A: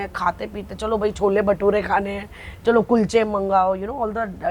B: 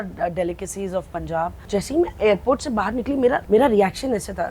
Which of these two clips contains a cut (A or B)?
B